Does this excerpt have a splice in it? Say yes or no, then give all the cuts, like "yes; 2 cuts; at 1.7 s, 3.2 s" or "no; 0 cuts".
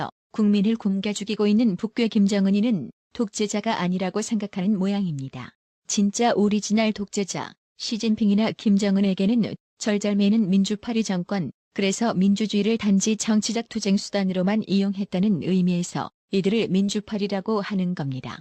yes; 1 cut; at 4.4 s